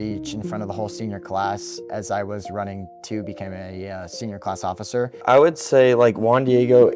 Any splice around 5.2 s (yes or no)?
yes